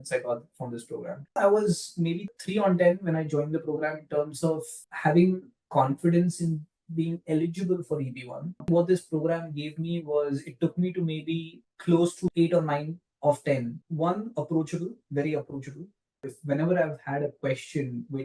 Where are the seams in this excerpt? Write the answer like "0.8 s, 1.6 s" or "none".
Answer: 1.2 s, 13.8 s